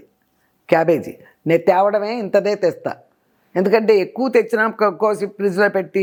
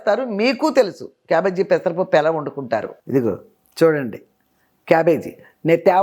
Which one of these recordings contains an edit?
second; 1 cut; at 2.9 s

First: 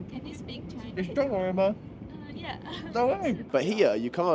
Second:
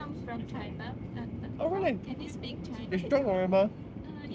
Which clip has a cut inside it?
first; 1 cut; at 3.4 s

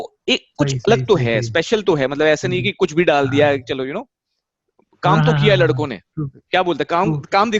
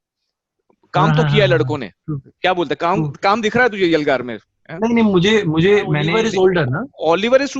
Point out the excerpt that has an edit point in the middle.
second; 1 cut; at 6.1 s

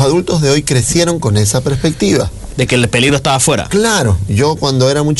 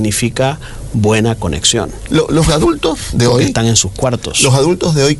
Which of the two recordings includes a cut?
second; 1 cut; at 2.0 s

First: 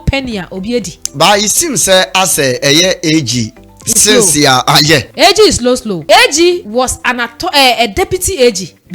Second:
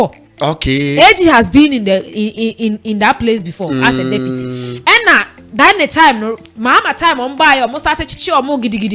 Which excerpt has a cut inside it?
first; 3 cuts; at 5.1 s, 5.9 s, 6.6 s

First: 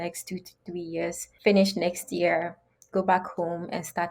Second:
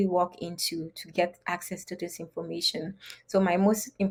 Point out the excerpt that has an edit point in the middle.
first; 1 cut; at 1.3 s

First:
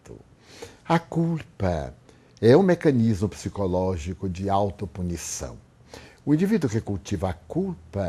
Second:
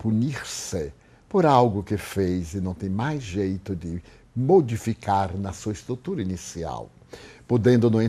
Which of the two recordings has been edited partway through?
second; 1 cut; at 5.0 s

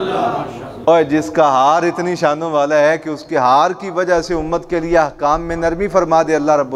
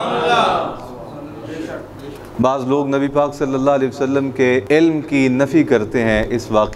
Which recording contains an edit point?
second; 2 cuts; at 2.2 s, 4.6 s

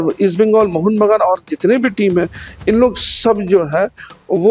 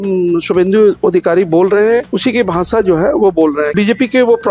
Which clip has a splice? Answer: second; 2 cuts; at 2.1 s, 3.7 s

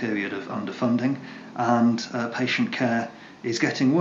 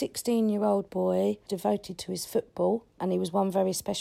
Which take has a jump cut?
second; 2 cuts; at 1.5 s, 3.0 s

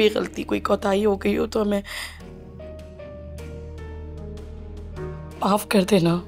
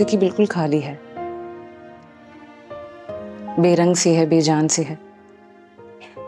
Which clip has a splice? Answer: first; 1 cut; at 5.3 s

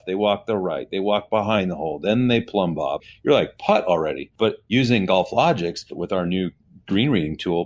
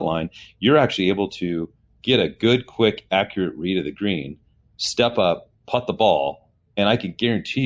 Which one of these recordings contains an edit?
first; 3 cuts; at 3.0 s, 4.7 s, 6.0 s

